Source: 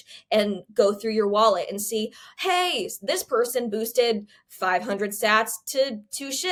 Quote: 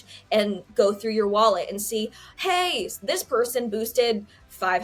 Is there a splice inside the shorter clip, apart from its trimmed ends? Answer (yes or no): no